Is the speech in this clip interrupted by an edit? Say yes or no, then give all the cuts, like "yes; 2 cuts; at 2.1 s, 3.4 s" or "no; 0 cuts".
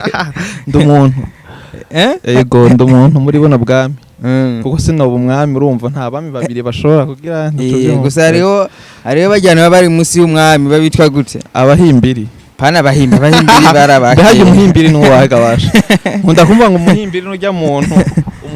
no; 0 cuts